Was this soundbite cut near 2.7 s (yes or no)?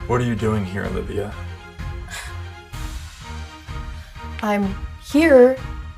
no